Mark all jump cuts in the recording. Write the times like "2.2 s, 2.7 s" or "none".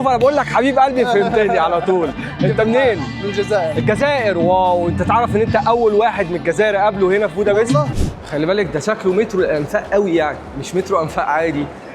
7.9 s